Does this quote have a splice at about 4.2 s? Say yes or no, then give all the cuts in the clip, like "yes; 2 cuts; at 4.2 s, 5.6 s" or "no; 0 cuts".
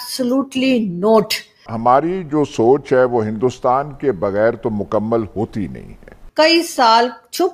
no; 2 cuts; at 1.7 s, 6.2 s